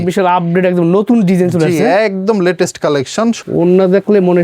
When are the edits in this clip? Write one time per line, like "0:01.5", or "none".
0:03.4